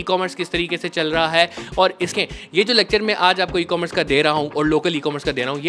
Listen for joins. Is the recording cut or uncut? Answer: cut